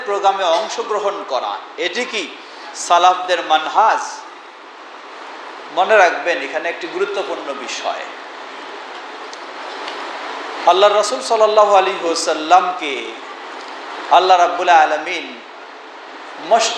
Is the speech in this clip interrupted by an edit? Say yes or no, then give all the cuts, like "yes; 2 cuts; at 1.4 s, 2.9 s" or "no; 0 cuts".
no; 0 cuts